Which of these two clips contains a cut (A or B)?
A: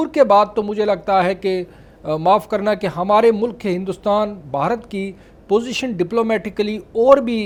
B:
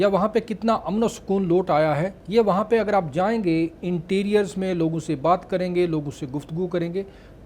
B